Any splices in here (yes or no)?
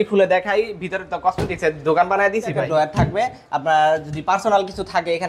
yes